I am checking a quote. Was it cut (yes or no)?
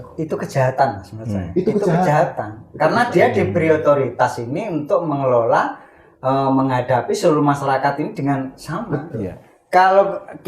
no